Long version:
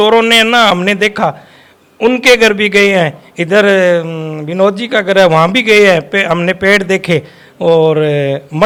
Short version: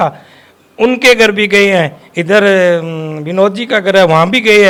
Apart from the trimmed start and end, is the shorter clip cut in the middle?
no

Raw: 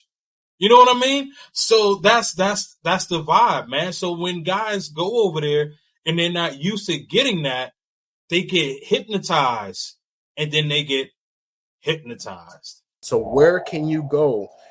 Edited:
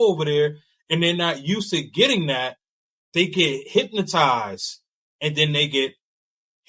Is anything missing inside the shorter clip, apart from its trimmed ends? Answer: no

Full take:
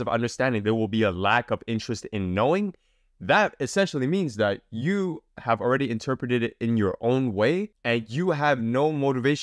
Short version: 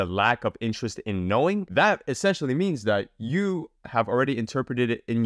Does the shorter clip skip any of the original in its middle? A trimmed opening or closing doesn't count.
yes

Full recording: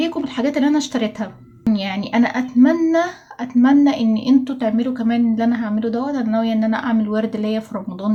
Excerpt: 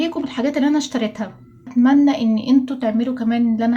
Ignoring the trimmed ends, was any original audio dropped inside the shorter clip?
yes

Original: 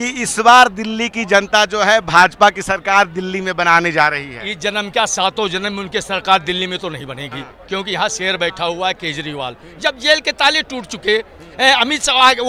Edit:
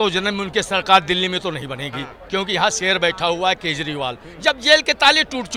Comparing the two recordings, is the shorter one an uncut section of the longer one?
yes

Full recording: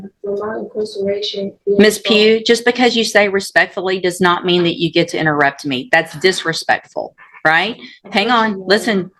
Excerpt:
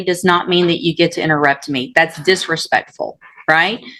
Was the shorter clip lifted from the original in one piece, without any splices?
yes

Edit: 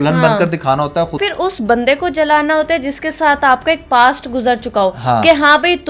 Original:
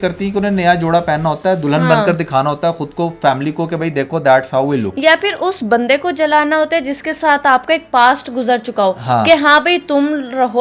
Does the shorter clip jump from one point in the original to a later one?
yes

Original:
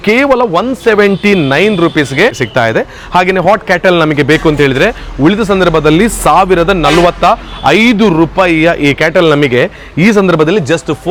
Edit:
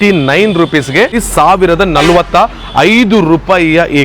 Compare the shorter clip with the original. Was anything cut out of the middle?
yes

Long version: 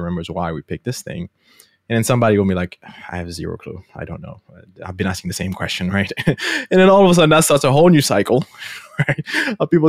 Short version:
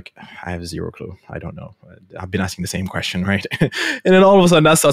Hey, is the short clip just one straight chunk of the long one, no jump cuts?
yes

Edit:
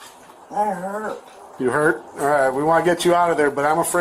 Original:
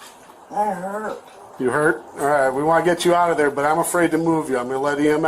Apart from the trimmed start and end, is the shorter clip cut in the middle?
no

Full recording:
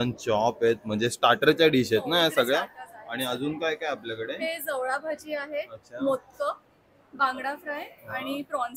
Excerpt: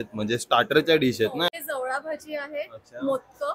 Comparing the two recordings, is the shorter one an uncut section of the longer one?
no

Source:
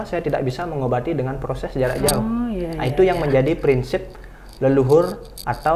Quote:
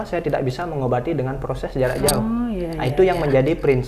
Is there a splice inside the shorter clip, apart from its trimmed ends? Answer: no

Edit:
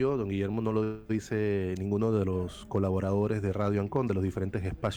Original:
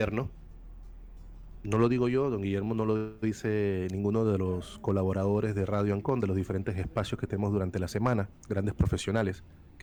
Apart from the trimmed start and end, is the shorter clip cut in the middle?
no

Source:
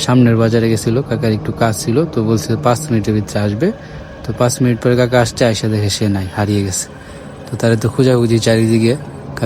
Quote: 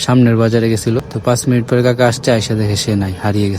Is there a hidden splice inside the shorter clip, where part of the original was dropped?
yes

